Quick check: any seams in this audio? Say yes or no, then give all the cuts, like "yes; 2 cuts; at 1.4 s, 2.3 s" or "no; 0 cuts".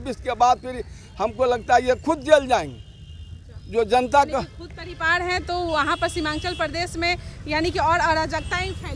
no; 0 cuts